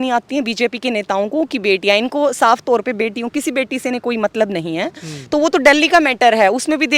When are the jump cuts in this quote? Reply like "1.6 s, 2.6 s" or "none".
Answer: none